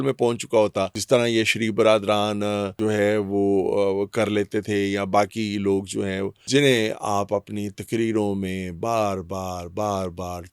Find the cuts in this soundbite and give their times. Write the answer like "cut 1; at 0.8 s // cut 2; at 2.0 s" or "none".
cut 1; at 1.0 s // cut 2; at 2.8 s // cut 3; at 6.4 s